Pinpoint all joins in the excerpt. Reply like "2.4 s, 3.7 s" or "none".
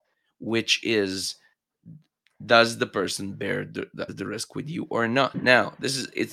4.1 s, 5.4 s

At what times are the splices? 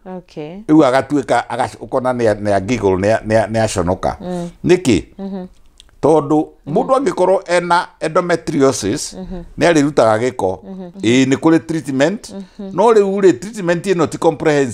10.9 s

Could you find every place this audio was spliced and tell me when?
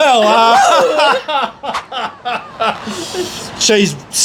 none

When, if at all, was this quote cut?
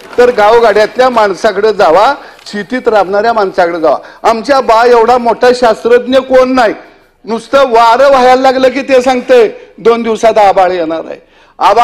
none

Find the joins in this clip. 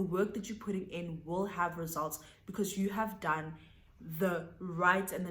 none

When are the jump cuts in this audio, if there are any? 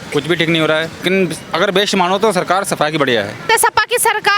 1.0 s, 3.4 s

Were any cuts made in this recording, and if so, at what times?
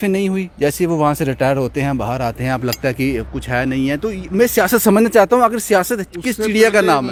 none

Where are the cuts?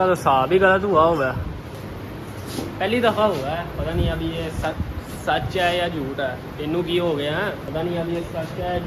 1.8 s, 7.6 s

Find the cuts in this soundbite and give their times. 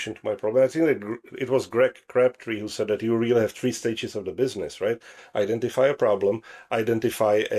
none

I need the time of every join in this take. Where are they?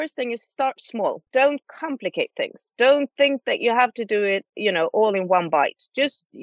1.2 s

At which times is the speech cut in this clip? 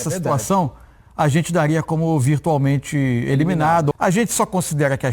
3.9 s

